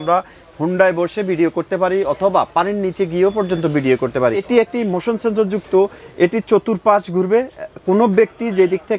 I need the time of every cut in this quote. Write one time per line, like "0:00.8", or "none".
0:04.5